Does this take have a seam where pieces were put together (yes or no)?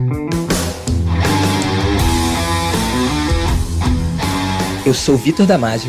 no